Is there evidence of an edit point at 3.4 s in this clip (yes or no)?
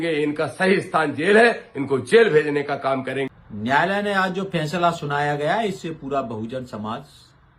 yes